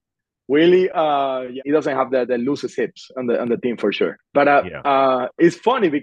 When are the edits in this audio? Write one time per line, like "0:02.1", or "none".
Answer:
0:01.6
0:04.2